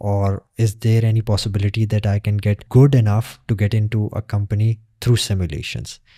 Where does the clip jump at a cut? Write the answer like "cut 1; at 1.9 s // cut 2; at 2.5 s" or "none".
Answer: none